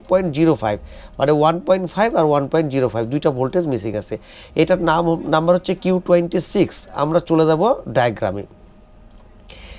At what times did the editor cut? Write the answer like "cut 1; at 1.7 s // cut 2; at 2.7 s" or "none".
none